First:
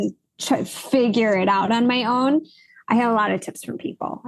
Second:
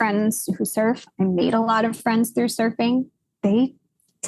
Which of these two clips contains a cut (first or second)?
second